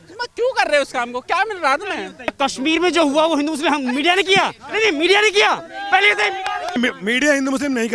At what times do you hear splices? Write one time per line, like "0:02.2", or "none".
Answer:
0:02.3
0:06.8